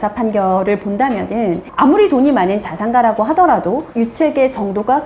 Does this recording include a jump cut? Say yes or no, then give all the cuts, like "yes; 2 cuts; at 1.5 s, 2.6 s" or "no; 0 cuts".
no; 0 cuts